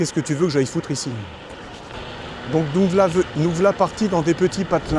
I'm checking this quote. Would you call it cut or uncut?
cut